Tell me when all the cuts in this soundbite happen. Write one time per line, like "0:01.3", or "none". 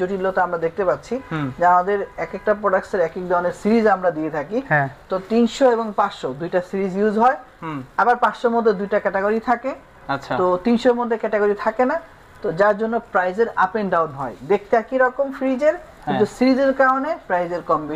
none